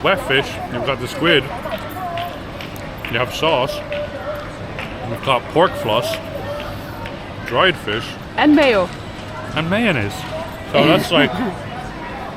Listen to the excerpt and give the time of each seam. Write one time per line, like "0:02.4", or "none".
none